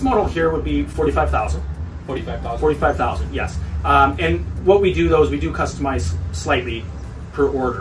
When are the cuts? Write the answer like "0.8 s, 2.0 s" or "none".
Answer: none